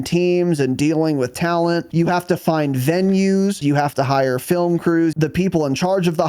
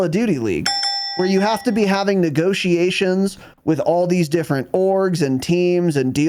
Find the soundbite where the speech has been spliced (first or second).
first